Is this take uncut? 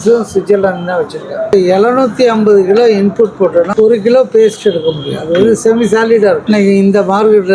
no; 3 cuts; at 1.5 s, 3.7 s, 6.4 s

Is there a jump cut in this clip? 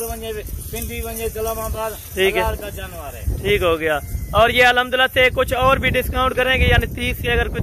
no; 0 cuts

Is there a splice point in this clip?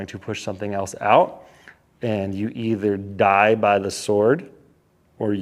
no; 0 cuts

